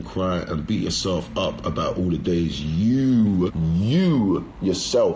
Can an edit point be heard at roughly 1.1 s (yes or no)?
no